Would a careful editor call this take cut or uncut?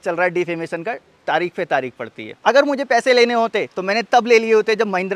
uncut